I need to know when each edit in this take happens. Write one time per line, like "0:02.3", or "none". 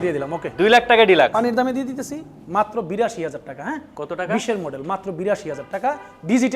0:01.3